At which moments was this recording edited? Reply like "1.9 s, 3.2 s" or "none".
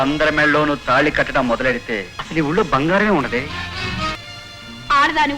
2.1 s, 4.1 s